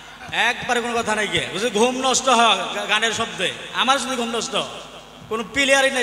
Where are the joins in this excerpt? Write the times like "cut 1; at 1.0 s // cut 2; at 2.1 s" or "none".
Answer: none

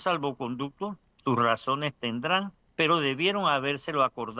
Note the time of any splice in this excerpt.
cut 1; at 1.1 s // cut 2; at 2.6 s

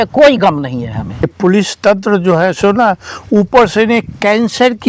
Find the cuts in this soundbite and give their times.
cut 1; at 1.3 s

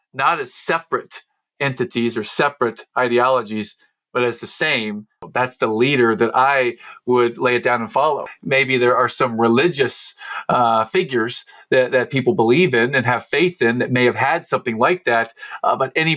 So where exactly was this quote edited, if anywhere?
cut 1; at 5.2 s // cut 2; at 8.3 s

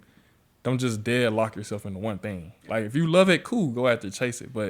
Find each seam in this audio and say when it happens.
none

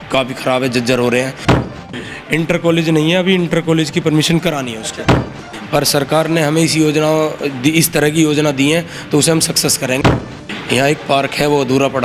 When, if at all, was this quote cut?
cut 1; at 1.5 s // cut 2; at 5.4 s // cut 3; at 10.1 s

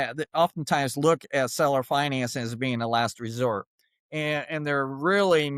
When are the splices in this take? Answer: none

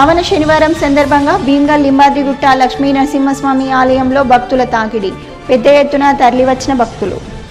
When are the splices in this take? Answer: none

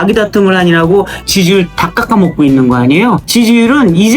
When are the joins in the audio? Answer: cut 1; at 1.2 s

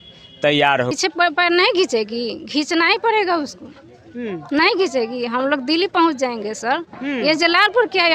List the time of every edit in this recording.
cut 1; at 0.9 s

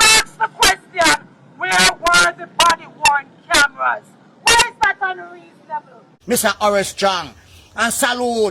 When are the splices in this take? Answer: cut 1; at 6.1 s

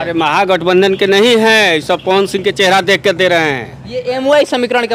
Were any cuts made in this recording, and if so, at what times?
none

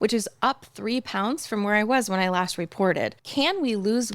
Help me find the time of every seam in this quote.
cut 1; at 3.2 s

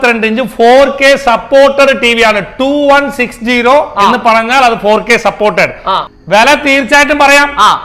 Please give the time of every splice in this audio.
cut 1; at 6.1 s

